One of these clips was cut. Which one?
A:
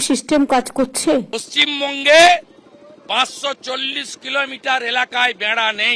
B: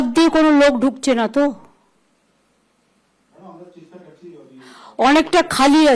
A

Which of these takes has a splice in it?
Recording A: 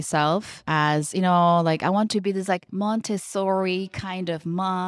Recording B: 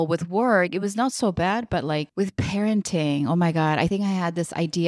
B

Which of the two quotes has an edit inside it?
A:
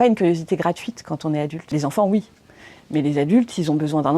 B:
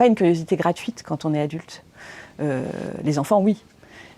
A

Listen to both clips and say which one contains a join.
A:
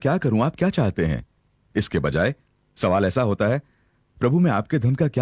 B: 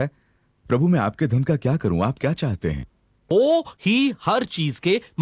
B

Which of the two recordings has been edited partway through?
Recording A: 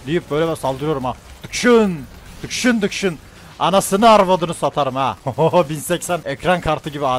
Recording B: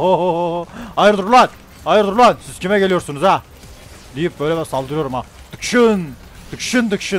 A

